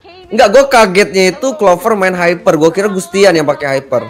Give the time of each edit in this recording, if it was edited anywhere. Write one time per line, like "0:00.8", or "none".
none